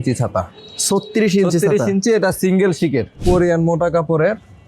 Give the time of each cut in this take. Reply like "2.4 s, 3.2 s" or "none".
3.2 s